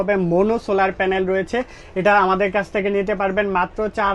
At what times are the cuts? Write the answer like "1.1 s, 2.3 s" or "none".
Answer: none